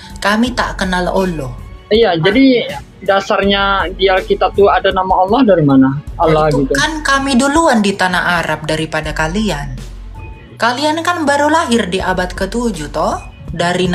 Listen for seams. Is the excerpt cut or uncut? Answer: uncut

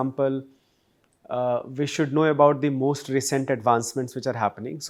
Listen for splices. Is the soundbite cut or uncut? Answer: uncut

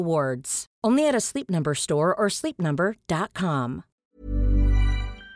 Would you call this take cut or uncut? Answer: cut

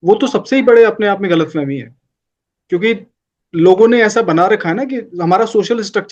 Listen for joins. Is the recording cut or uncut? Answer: uncut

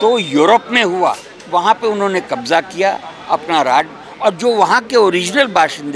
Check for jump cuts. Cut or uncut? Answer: cut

